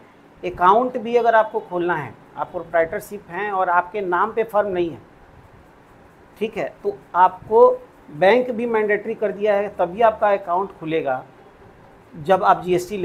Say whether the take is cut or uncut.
uncut